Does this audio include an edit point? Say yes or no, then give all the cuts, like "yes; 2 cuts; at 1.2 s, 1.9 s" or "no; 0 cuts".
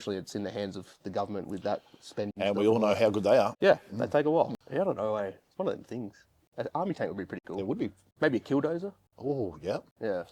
yes; 1 cut; at 4.6 s